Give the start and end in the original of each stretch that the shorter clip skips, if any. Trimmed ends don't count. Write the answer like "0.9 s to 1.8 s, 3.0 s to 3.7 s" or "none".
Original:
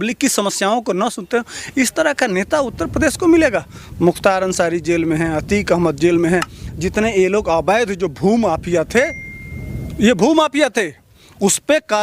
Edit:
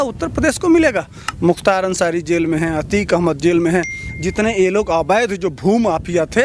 none